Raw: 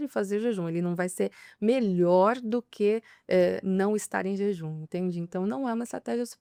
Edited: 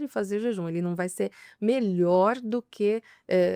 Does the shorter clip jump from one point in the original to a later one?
no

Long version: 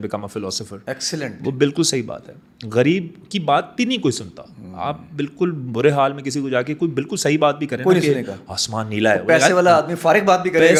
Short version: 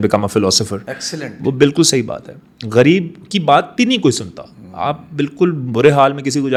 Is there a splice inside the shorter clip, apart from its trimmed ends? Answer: no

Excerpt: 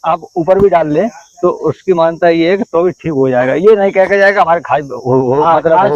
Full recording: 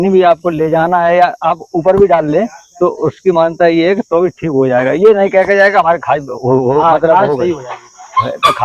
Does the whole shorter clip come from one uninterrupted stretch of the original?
yes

